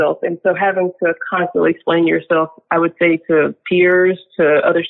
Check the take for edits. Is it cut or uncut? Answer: uncut